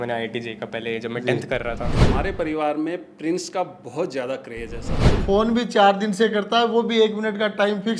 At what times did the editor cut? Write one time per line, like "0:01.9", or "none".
0:02.0
0:05.0

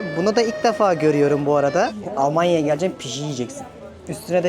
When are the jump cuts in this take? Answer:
0:02.0

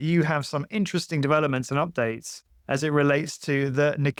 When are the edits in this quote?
none

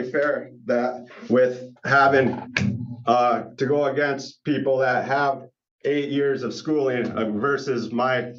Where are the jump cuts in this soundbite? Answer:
none

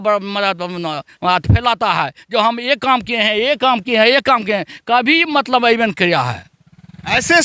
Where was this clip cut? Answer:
none

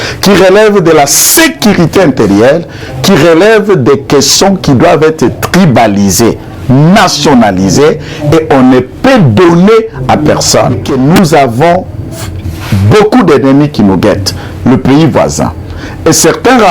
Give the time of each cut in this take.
0:10.9

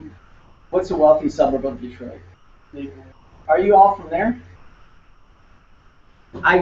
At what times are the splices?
0:01.3

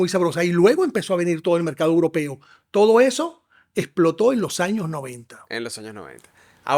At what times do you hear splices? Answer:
none

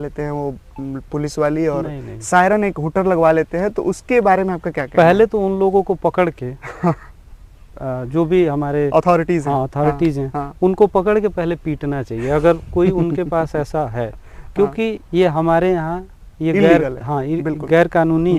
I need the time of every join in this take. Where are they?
none

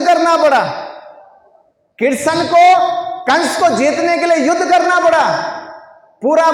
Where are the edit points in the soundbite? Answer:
none

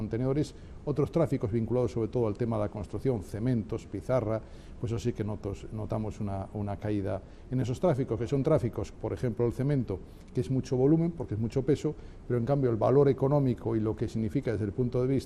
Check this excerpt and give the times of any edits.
none

